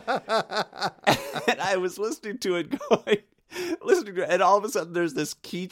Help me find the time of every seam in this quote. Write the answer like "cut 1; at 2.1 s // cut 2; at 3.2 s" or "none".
cut 1; at 1.0 s